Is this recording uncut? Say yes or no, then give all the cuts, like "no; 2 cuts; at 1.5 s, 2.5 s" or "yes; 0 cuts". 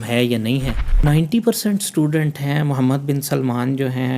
no; 1 cut; at 1.0 s